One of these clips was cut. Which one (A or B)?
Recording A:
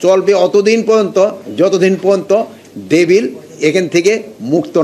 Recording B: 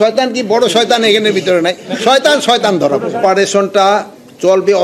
B